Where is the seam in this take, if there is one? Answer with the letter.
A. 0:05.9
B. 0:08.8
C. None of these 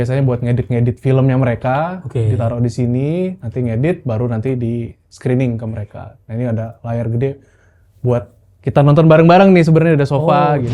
C